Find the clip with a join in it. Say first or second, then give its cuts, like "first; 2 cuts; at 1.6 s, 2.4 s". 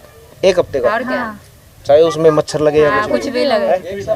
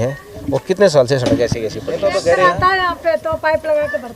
second; 1 cut; at 2.2 s